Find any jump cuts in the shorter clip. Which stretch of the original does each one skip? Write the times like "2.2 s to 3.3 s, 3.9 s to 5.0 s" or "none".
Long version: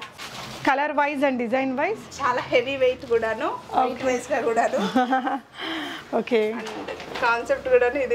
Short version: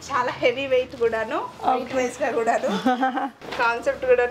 5.5 s to 7.0 s